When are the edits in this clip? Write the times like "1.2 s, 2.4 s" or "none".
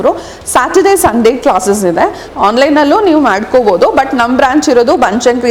2.2 s